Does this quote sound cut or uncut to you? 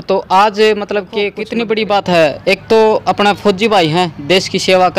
cut